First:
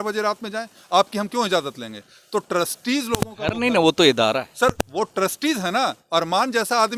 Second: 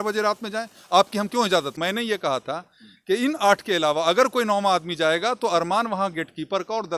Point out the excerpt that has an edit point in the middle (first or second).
second